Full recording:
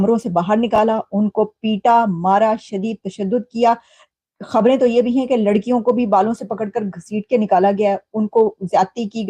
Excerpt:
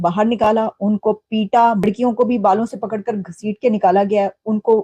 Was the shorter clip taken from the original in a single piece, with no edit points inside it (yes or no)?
no